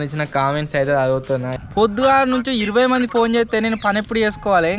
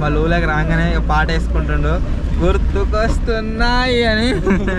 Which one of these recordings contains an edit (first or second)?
first